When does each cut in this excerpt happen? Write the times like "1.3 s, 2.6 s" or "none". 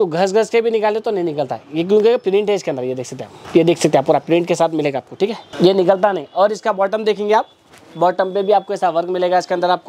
none